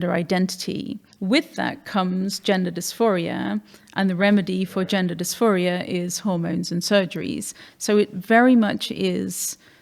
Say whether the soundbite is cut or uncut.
cut